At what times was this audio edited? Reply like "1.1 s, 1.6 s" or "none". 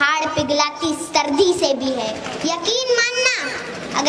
2.3 s